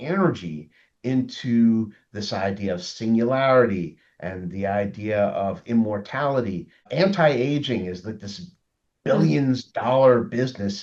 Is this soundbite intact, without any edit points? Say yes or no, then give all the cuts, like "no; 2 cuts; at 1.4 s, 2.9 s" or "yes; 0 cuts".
no; 1 cut; at 6.9 s